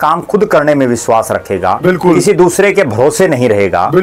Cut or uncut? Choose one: uncut